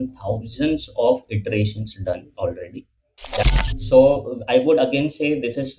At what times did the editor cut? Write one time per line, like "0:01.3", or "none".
0:03.4